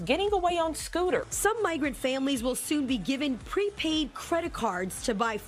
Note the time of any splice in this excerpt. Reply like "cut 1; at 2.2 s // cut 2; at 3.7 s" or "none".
none